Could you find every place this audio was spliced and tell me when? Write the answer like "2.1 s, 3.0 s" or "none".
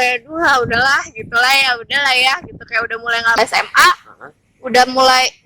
3.4 s